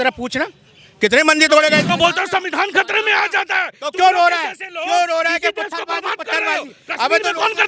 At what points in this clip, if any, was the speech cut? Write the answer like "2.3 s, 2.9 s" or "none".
1.8 s

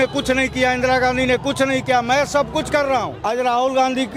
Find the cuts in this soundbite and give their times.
3.1 s

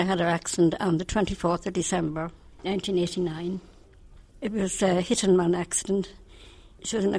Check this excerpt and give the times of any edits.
none

